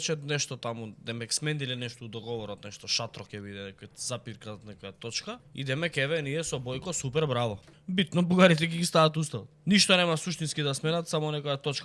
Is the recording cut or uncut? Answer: cut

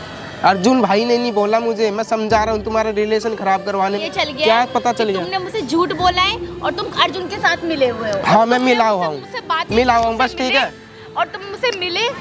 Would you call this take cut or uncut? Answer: cut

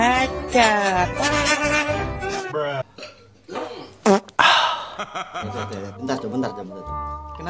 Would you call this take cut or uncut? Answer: cut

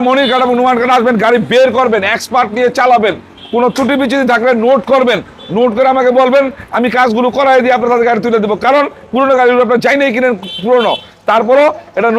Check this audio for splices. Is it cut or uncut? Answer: uncut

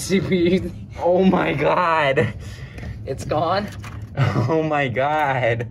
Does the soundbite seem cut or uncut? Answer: uncut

